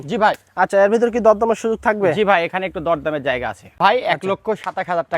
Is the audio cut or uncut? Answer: cut